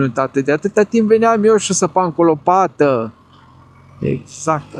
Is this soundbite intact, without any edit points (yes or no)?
yes